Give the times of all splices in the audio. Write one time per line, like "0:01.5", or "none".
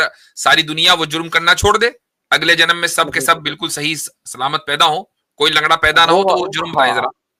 none